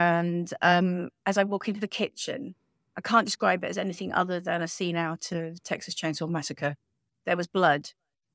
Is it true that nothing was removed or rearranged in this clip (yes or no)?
yes